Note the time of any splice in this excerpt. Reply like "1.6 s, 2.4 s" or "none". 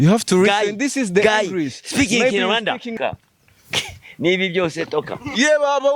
2.9 s